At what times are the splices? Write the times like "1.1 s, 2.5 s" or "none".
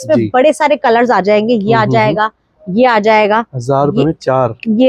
none